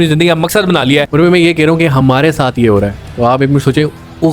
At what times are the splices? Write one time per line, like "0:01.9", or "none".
0:01.1